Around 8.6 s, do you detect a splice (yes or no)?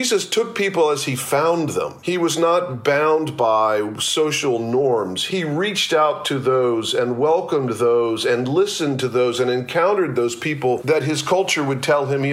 no